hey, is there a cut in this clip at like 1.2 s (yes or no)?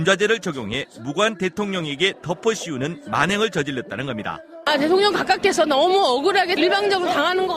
no